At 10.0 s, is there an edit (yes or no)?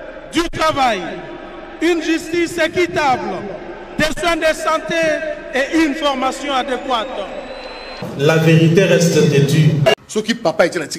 yes